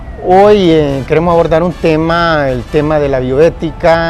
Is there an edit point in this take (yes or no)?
no